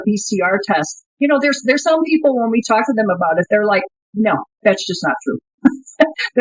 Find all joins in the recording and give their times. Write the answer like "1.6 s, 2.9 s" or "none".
1.0 s